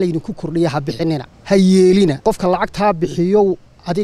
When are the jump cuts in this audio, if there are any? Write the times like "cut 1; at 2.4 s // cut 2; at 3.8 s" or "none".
cut 1; at 1.3 s // cut 2; at 2.2 s